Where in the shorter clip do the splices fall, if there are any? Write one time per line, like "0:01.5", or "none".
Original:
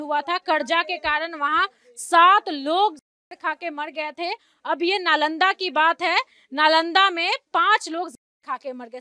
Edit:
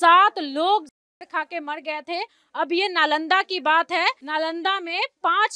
0:04.2